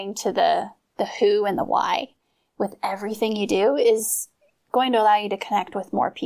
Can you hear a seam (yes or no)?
no